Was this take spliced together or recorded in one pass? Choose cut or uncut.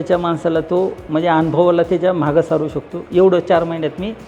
uncut